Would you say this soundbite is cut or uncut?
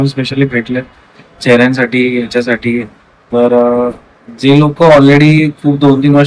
uncut